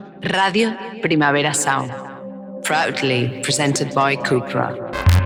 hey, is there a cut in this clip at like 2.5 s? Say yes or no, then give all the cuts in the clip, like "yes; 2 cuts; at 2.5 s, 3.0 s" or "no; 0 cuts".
no; 0 cuts